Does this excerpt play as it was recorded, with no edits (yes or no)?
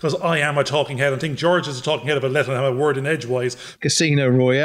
no